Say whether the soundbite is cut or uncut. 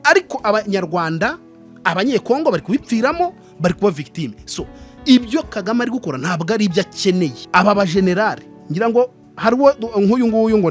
cut